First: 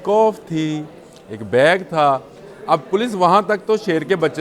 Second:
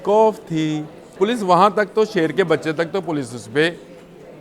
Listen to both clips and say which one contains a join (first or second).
second